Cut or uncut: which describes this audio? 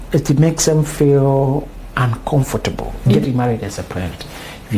cut